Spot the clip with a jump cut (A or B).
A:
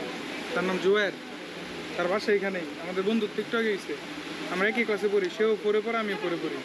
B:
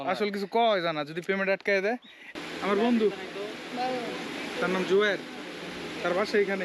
B